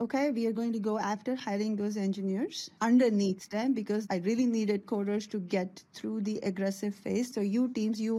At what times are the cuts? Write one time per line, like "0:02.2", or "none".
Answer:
0:02.6
0:04.0
0:07.3